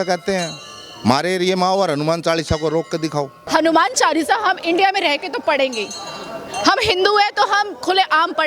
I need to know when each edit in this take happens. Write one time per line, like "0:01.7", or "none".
0:03.4